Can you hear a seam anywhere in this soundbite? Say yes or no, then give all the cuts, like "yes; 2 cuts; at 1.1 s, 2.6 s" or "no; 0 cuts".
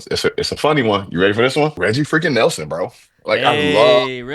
yes; 1 cut; at 1.8 s